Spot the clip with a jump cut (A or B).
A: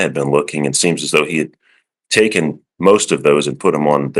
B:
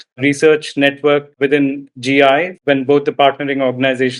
B